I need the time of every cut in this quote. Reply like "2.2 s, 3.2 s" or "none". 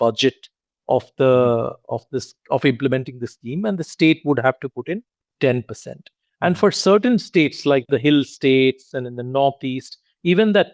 none